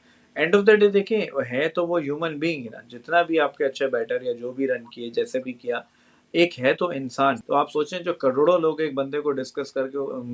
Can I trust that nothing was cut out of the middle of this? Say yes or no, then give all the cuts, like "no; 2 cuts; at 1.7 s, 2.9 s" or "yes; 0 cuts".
no; 1 cut; at 7.4 s